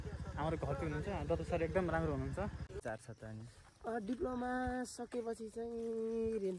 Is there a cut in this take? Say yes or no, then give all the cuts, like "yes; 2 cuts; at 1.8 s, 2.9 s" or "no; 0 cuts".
yes; 1 cut; at 3.0 s